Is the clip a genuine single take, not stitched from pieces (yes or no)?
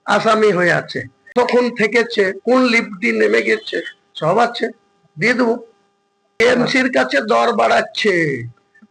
no